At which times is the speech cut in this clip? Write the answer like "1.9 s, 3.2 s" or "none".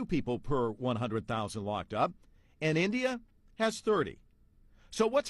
3.5 s